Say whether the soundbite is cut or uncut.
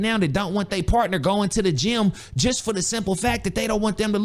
uncut